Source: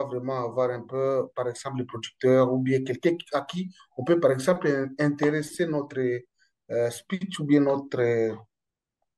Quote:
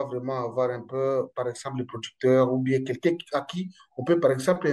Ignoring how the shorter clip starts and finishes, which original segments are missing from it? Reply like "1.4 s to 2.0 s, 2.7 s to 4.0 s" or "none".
none

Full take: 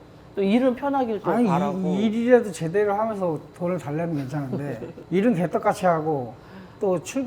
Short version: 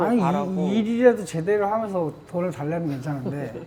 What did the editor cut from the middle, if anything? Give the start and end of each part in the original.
none

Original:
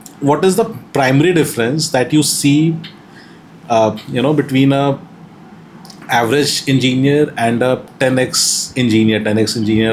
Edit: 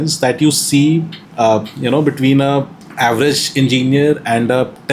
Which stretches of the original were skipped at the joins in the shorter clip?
2.9 s to 3.5 s, 5.1 s to 5.9 s

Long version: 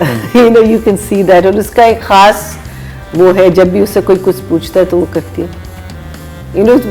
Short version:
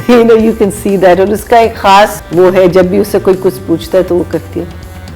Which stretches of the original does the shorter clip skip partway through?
2.5 s to 3.0 s

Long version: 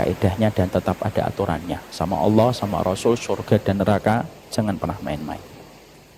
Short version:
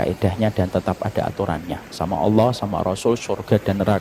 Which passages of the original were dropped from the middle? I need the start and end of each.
none

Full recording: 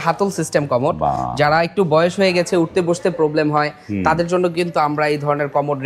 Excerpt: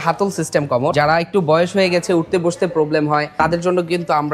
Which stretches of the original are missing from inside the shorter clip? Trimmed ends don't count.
0.9 s to 1.4 s, 3.8 s to 4.0 s

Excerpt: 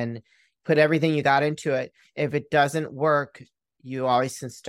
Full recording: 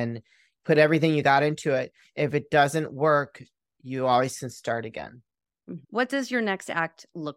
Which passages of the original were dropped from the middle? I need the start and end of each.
none

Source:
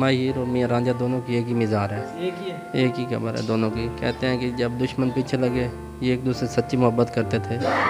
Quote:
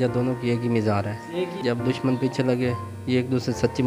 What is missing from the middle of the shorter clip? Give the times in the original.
2.4 s to 4.5 s

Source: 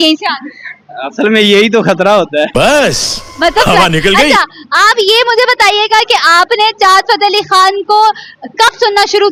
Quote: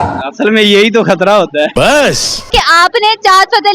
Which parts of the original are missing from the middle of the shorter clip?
3.3 s to 6.1 s

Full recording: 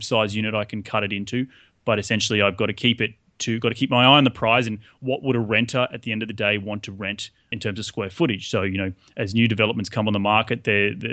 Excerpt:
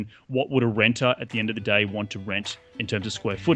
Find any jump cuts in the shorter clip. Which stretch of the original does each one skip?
none

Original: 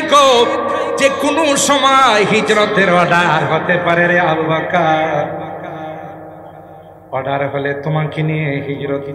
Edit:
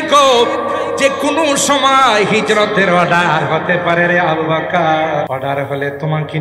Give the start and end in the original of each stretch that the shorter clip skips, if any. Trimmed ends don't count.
5.3 s to 7.1 s

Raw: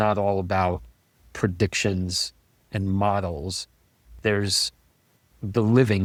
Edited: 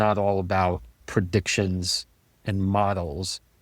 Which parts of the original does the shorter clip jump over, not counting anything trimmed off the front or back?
0.9 s to 1.2 s

